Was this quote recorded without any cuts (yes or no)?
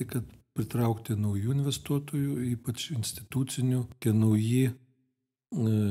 no